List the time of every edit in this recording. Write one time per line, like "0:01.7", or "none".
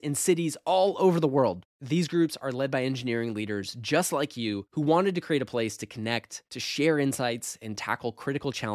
none